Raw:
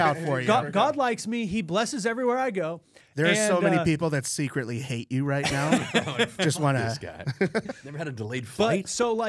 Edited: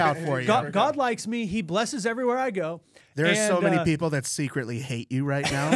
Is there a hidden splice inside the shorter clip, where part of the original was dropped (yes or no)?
no